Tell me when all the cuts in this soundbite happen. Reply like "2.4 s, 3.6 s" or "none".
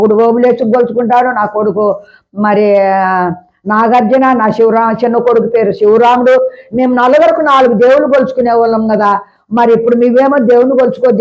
none